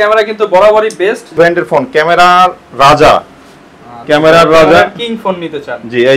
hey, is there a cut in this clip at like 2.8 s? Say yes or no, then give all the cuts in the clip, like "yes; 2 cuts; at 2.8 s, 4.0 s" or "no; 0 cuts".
no; 1 cut; at 1.4 s